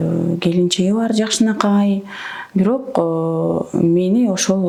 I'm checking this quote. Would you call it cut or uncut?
uncut